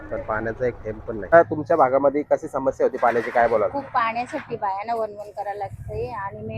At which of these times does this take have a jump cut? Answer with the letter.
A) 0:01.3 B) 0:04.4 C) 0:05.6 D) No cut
A